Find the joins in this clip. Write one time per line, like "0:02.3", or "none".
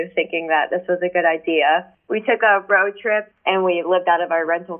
0:03.3